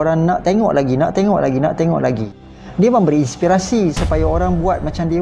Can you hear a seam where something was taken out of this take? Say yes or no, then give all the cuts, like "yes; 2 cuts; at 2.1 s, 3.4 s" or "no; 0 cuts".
yes; 1 cut; at 2.4 s